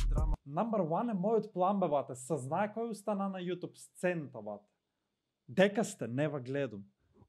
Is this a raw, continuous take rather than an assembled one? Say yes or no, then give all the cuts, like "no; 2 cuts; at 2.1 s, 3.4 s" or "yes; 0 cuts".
yes; 0 cuts